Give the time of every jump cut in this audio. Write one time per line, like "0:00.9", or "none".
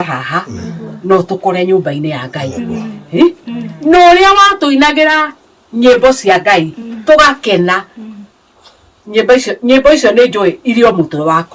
none